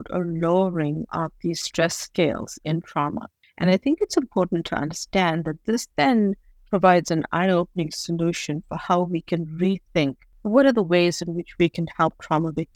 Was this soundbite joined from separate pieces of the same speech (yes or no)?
no